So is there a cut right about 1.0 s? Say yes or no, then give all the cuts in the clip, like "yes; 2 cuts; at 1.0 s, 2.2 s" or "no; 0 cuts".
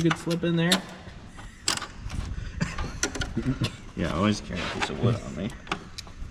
no; 0 cuts